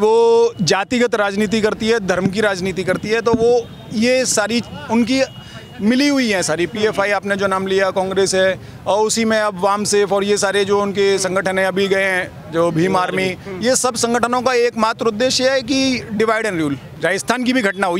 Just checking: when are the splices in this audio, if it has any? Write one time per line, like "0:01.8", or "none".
0:16.9